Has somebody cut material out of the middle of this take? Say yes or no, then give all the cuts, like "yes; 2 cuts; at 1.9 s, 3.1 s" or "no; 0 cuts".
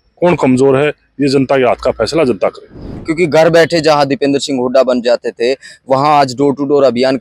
yes; 1 cut; at 2.9 s